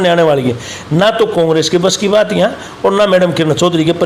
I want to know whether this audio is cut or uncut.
uncut